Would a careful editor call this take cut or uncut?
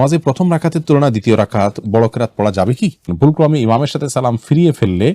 cut